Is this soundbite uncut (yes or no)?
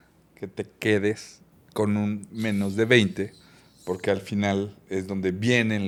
yes